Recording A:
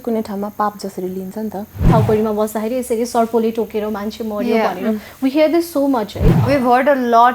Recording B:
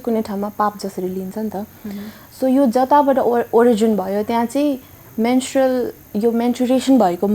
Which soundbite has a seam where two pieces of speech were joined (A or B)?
A